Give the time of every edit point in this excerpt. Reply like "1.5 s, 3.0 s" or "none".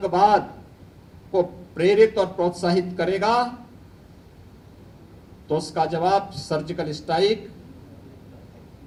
none